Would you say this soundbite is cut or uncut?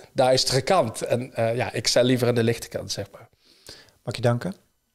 uncut